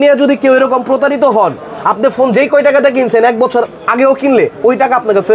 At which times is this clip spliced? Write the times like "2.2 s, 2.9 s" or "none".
none